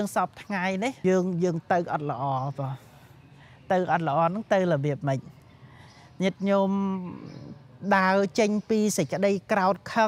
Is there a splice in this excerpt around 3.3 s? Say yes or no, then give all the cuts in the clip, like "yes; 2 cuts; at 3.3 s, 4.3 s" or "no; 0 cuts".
no; 1 cut; at 1.0 s